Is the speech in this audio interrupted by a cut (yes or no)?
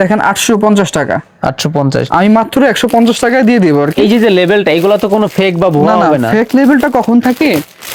no